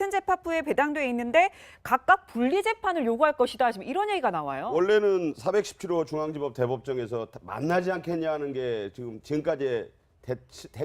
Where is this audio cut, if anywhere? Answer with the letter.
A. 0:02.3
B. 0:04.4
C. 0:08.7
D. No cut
B